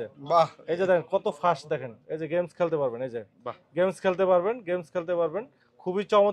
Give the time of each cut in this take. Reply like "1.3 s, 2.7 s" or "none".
none